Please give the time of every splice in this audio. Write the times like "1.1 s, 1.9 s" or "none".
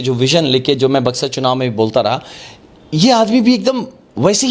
none